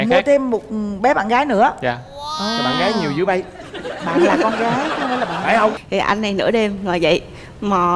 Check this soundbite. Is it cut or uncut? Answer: cut